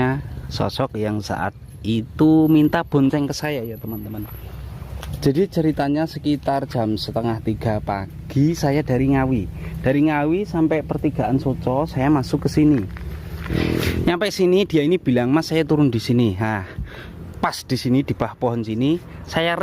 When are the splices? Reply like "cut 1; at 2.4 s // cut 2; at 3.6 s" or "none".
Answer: cut 1; at 13.5 s

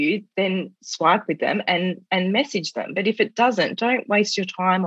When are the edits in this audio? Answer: none

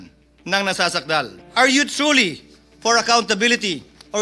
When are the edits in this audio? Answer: cut 1; at 1.4 s

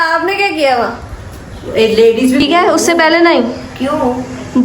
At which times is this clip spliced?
cut 1; at 2.4 s

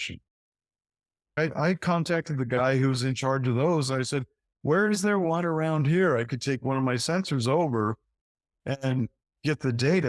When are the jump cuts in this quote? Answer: cut 1; at 1.3 s

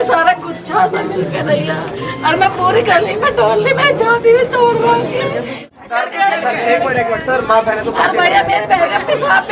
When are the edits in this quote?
cut 1; at 5.6 s

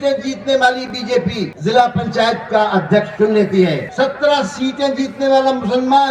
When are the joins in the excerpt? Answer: cut 1; at 1.5 s // cut 2; at 3.9 s

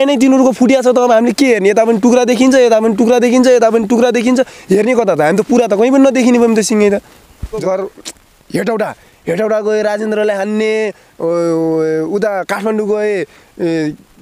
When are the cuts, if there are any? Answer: cut 1; at 7.5 s

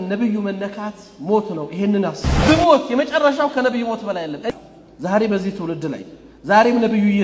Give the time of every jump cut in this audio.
cut 1; at 4.5 s

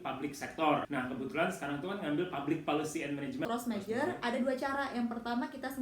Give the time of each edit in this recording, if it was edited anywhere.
cut 1; at 0.9 s // cut 2; at 3.4 s

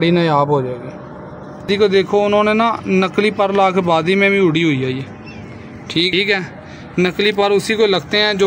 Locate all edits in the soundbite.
cut 1; at 1.6 s // cut 2; at 6.1 s

